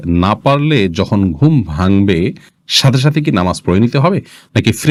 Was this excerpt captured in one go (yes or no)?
yes